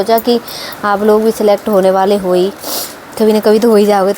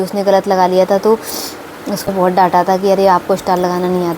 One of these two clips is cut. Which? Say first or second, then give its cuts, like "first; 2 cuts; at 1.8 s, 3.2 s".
second; 1 cut; at 2.1 s